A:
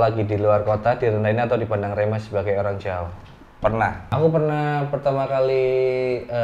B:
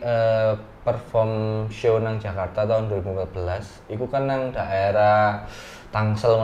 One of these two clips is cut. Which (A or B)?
A